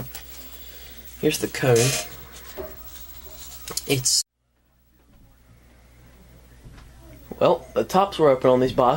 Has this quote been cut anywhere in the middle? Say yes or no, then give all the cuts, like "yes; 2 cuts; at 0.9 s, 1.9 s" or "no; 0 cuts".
no; 0 cuts